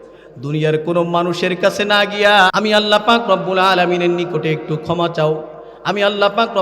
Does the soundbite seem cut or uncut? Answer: cut